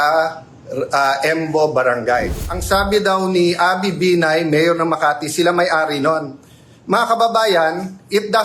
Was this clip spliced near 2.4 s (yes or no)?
yes